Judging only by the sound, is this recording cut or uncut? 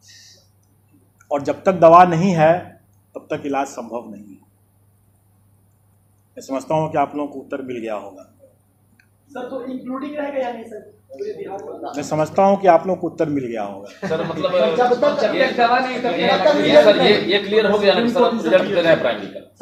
uncut